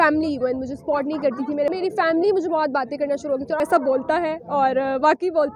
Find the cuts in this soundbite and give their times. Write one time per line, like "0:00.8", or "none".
0:01.7
0:03.6